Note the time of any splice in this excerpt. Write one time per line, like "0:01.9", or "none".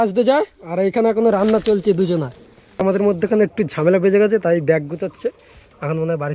0:02.8